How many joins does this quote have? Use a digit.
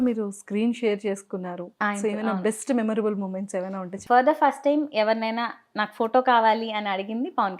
1